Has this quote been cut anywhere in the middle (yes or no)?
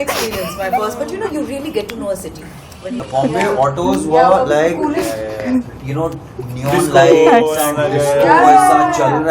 yes